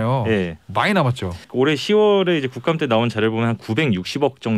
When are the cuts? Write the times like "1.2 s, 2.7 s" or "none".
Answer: 1.4 s